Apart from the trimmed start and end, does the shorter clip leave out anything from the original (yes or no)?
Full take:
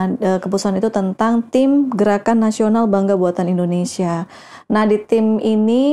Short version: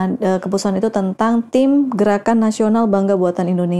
no